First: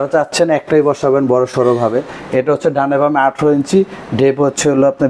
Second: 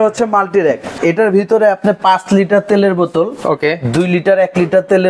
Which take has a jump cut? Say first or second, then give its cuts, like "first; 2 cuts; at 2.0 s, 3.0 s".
second; 1 cut; at 1.0 s